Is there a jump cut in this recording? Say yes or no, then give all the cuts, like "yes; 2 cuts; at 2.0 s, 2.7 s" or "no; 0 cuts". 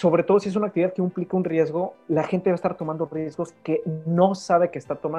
no; 0 cuts